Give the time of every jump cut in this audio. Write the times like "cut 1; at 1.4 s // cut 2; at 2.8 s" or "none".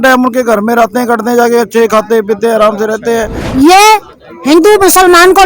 cut 1; at 3.4 s